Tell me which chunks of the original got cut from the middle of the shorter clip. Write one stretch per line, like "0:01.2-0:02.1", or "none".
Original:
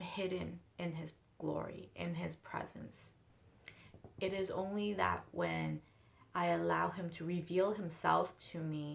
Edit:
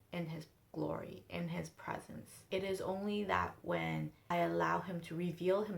0:03.0-0:04.0
0:05.9-0:06.3